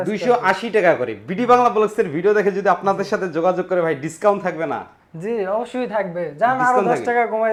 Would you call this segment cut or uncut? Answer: uncut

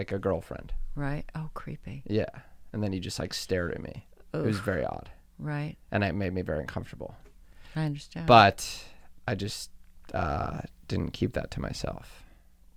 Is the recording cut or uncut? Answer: uncut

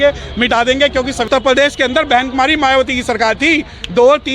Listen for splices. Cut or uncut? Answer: cut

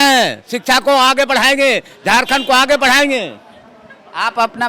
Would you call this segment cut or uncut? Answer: uncut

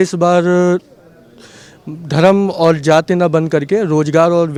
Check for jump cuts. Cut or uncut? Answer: uncut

